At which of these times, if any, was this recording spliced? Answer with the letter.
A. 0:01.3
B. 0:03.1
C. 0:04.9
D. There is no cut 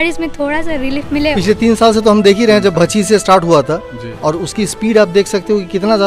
A